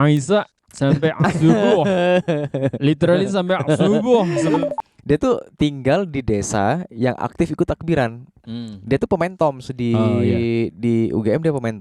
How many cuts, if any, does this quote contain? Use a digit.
1